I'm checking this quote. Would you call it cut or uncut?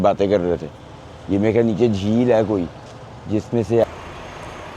cut